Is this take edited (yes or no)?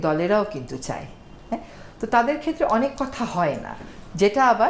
no